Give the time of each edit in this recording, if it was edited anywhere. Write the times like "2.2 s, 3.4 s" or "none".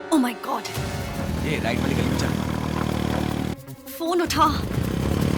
1.1 s